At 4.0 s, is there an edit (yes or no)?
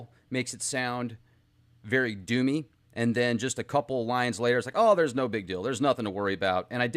yes